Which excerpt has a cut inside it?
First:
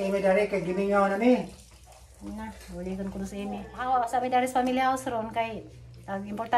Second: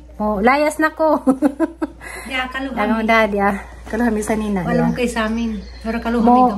first; 1 cut; at 3.7 s

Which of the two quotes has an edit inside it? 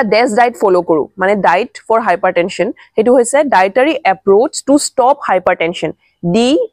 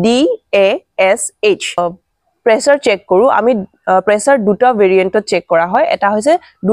second; 1 cut; at 1.8 s

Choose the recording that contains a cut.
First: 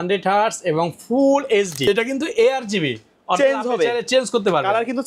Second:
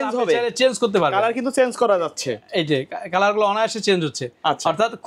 first; 1 cut; at 1.7 s

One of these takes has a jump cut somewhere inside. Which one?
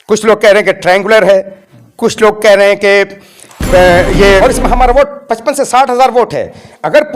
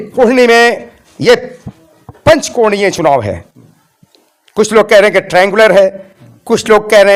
first; 1 cut; at 4.4 s

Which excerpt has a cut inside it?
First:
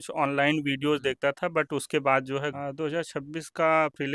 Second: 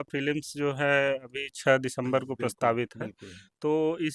first; 1 cut; at 2.6 s

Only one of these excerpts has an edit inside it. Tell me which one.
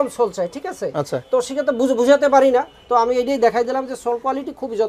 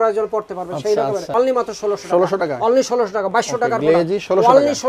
second; 1 cut; at 1.3 s

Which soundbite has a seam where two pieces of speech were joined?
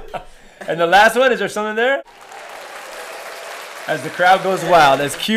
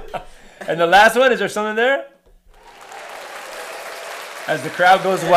first; 1 cut; at 2.2 s

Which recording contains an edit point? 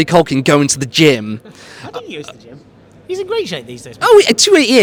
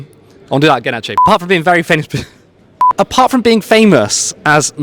second; 1 cut; at 1.1 s

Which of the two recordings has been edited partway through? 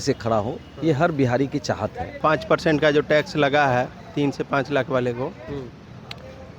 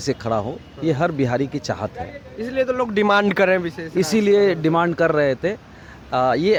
first; 1 cut; at 2.1 s

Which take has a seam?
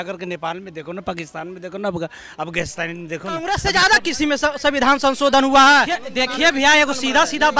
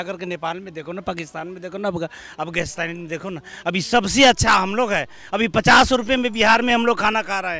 first; 2 cuts; at 3.4 s, 6.0 s

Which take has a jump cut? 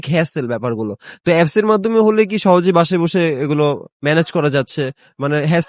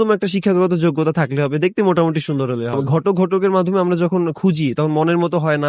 second; 1 cut; at 2.8 s

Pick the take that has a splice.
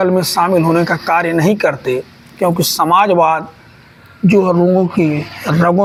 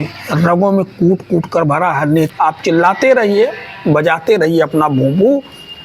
second; 1 cut; at 2.3 s

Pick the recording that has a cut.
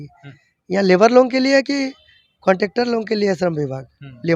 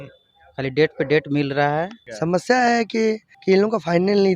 second; 2 cuts; at 2.0 s, 3.3 s

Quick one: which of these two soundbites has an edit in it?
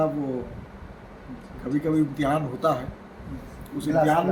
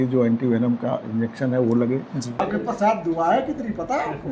second; 1 cut; at 2.3 s

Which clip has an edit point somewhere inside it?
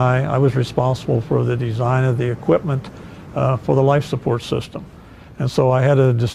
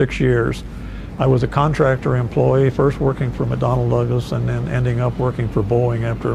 first; 1 cut; at 1.9 s

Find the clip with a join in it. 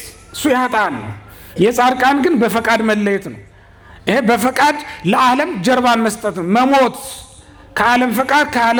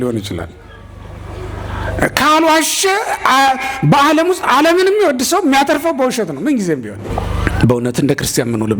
second; 1 cut; at 7.0 s

